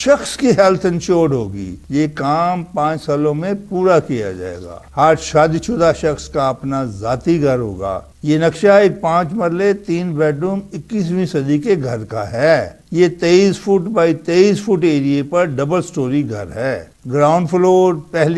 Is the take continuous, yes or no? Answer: yes